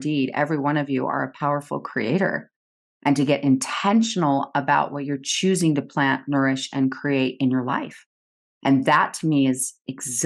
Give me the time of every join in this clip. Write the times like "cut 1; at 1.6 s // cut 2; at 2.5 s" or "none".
none